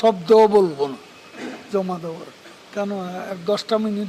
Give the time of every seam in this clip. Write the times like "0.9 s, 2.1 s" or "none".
2.6 s